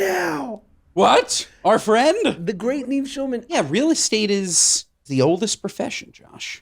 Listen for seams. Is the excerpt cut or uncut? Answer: cut